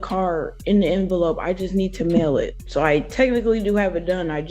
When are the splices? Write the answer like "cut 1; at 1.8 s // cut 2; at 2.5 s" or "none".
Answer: cut 1; at 2.6 s